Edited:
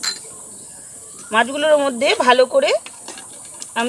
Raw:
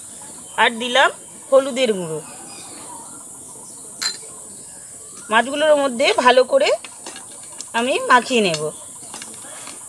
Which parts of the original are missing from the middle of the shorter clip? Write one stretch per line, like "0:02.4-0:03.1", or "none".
none